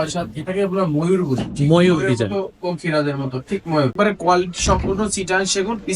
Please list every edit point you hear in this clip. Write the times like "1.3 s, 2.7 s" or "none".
3.9 s